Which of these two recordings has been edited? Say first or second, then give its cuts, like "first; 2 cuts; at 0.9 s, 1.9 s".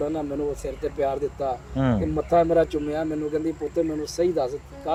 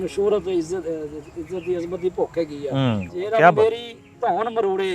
second; 1 cut; at 3.1 s